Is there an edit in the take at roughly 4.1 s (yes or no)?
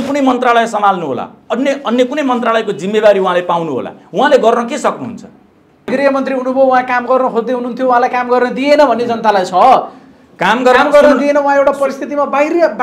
no